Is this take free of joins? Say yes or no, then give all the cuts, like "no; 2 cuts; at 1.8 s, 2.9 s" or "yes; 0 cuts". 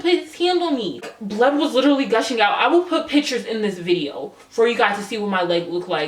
no; 1 cut; at 1.2 s